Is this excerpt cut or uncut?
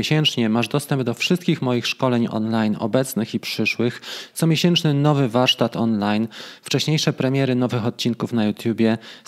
uncut